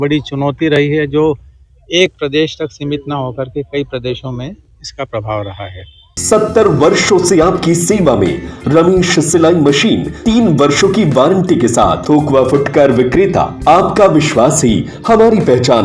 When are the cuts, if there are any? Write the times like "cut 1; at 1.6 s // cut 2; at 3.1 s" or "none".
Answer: cut 1; at 6.2 s // cut 2; at 10.1 s // cut 3; at 12.0 s // cut 4; at 13.5 s